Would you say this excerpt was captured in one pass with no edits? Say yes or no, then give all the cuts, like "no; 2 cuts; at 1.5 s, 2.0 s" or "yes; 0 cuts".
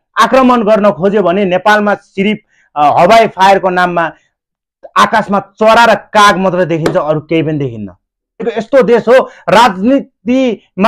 no; 1 cut; at 8.5 s